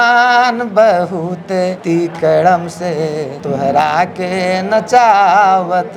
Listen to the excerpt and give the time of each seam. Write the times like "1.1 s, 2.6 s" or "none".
1.8 s, 3.3 s